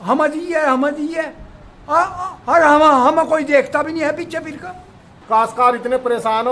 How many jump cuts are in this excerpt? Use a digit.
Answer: 1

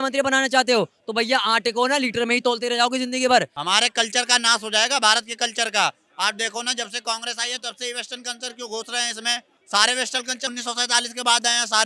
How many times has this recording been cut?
3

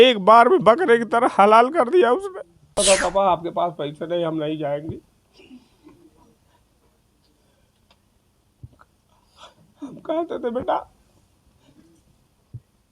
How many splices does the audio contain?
1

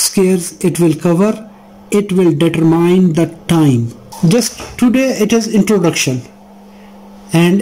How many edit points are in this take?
1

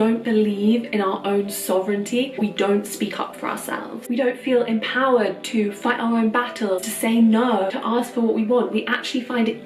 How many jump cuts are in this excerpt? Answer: 4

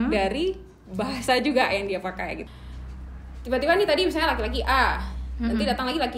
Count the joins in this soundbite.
1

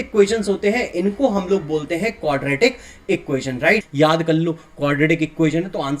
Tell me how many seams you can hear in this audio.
1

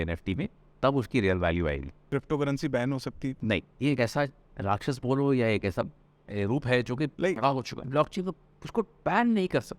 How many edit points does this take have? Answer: 3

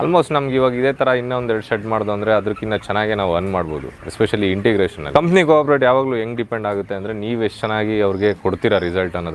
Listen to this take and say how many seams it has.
1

